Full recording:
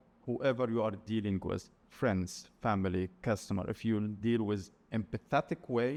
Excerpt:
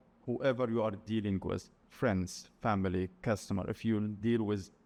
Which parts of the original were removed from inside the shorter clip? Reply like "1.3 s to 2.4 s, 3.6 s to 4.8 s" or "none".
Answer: none